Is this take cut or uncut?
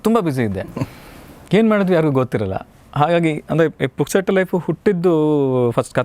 uncut